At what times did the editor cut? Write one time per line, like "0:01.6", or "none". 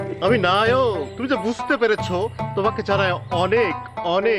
0:01.1